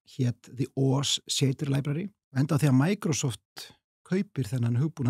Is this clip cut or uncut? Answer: cut